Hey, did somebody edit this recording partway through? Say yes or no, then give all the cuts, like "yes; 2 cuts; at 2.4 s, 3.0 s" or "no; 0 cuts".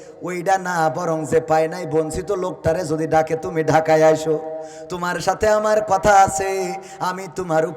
no; 0 cuts